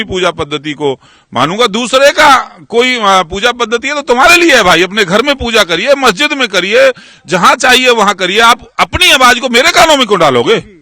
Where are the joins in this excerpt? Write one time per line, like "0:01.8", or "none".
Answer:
none